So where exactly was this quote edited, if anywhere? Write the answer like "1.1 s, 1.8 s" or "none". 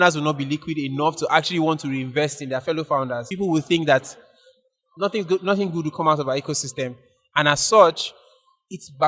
3.2 s